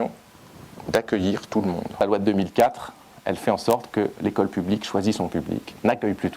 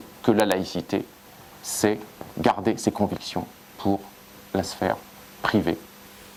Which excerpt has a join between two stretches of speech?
first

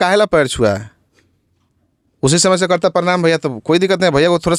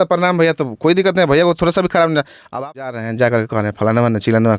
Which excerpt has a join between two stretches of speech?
second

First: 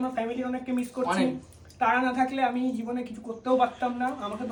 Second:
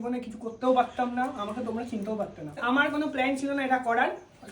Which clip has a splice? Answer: second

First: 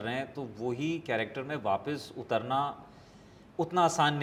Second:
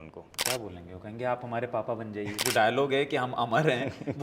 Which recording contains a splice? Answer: second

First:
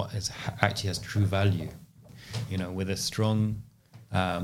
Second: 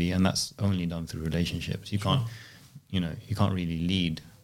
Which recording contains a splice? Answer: first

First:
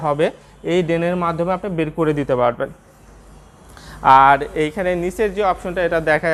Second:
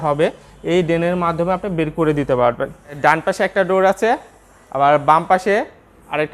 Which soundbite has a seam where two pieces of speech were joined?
second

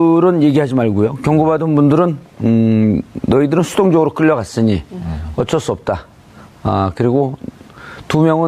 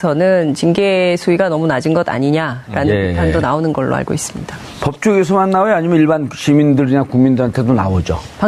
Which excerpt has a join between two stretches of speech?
first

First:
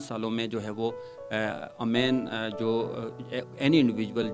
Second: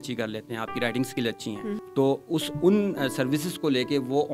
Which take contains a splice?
second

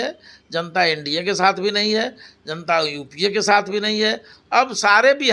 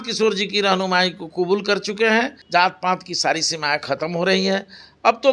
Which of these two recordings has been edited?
second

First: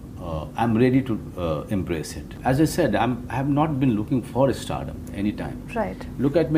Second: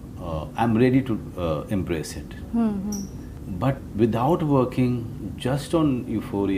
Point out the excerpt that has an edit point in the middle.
first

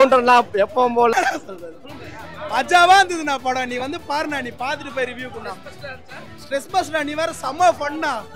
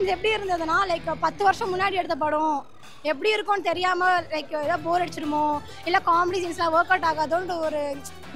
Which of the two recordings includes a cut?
first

